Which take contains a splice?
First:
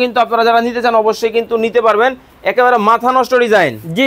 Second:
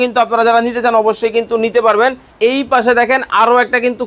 second; 1 cut; at 2.3 s

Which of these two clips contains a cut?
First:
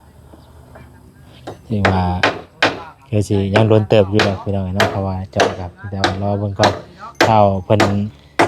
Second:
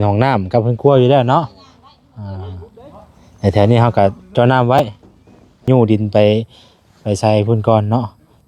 second; 1 cut; at 5.7 s

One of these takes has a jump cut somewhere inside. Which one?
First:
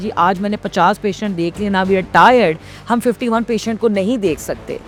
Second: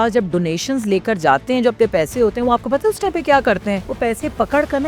second; 1 cut; at 3.9 s

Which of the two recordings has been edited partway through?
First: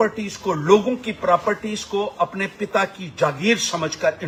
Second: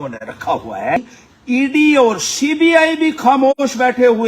second; 1 cut; at 1.1 s

